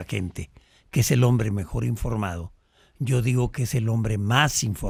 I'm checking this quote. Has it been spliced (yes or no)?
no